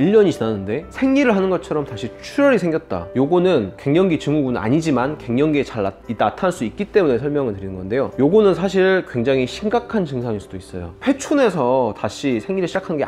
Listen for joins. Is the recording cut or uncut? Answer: uncut